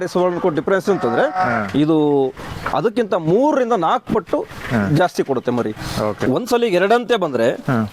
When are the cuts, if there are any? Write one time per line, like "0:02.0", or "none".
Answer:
0:06.2